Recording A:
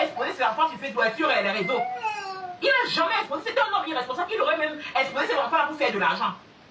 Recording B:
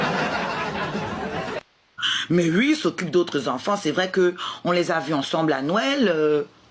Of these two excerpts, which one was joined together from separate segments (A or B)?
B